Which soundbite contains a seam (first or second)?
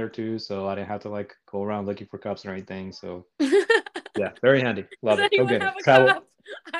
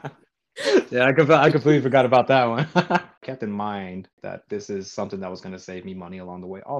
second